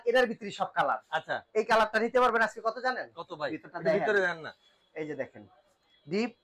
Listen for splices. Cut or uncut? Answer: uncut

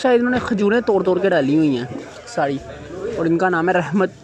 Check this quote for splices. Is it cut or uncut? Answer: uncut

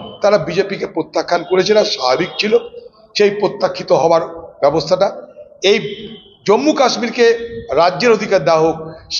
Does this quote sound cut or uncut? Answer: uncut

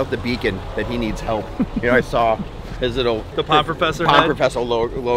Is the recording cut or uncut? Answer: uncut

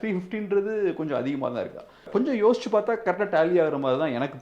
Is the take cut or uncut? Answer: cut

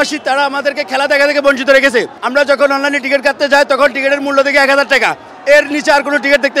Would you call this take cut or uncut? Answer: cut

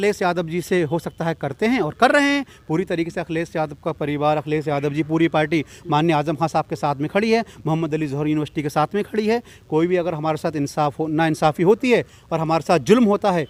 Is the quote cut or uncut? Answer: uncut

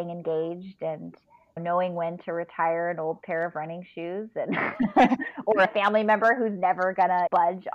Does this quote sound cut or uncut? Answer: uncut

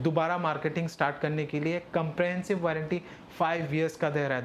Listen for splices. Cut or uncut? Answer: uncut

